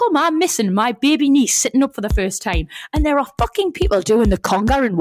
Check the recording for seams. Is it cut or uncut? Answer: uncut